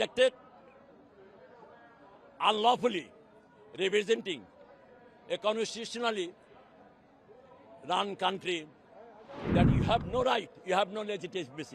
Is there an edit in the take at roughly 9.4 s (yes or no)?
yes